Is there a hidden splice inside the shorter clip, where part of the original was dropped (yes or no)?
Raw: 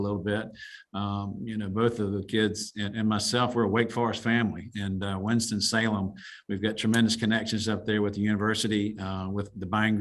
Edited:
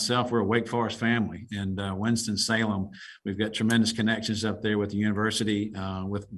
no